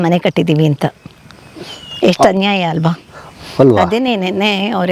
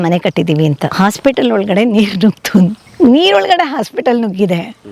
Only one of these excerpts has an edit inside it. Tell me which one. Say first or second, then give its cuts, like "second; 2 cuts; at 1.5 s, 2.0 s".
second; 2 cuts; at 0.9 s, 2.8 s